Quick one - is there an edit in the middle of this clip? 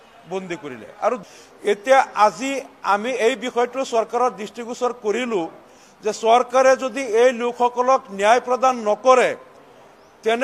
yes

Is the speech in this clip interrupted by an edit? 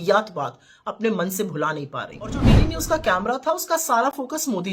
yes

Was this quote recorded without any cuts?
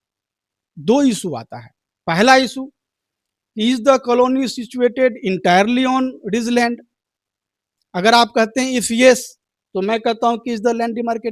yes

